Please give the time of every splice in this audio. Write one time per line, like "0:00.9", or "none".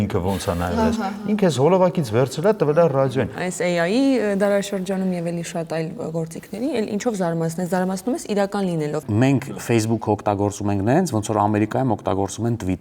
0:03.4
0:09.0